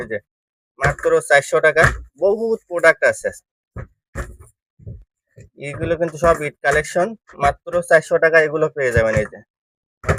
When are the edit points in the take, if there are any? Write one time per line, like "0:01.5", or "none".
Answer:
none